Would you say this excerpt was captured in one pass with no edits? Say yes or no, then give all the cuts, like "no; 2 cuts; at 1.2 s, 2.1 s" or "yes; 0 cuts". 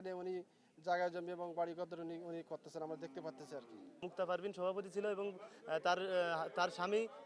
no; 1 cut; at 4.1 s